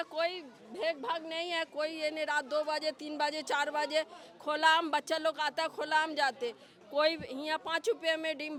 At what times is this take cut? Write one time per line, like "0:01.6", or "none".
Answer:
none